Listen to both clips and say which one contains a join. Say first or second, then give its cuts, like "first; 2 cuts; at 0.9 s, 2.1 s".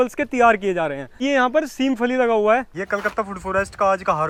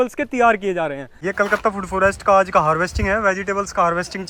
second; 1 cut; at 1.2 s